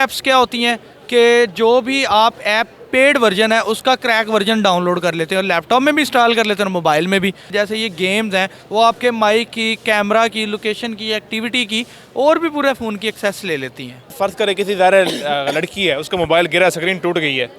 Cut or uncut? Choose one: cut